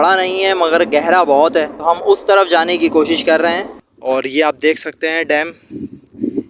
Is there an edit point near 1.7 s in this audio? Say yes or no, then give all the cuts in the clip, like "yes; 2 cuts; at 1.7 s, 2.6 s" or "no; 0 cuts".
no; 1 cut; at 3.8 s